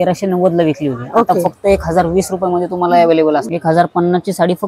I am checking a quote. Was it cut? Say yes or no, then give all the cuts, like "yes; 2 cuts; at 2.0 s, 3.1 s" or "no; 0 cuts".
yes; 1 cut; at 3.5 s